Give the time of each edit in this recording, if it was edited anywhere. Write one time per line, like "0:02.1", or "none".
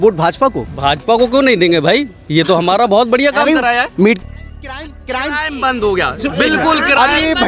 0:04.2